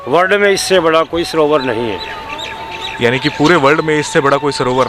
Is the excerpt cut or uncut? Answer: uncut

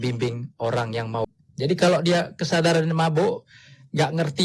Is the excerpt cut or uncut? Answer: cut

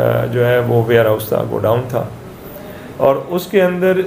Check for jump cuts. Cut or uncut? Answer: uncut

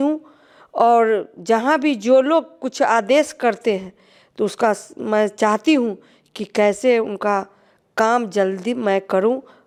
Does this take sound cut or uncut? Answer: uncut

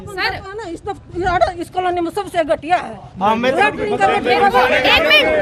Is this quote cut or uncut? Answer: uncut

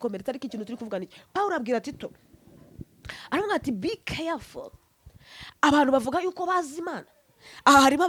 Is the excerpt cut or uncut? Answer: uncut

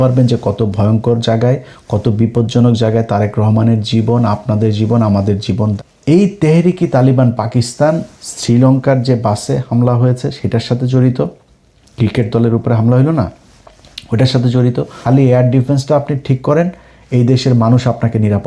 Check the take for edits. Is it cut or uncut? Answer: cut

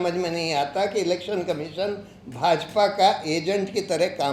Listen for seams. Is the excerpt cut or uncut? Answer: uncut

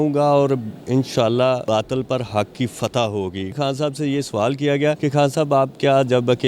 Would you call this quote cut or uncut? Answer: cut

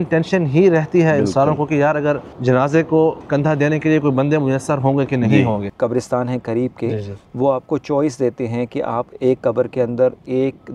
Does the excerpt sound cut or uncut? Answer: cut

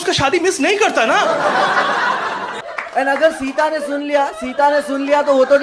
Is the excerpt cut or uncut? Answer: cut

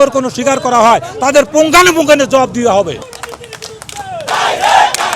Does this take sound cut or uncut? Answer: cut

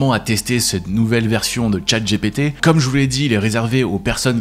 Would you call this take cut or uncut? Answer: cut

